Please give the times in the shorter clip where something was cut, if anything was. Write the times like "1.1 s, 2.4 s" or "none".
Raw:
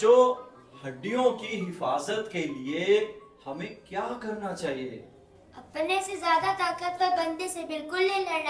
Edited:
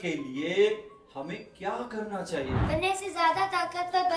2.6 s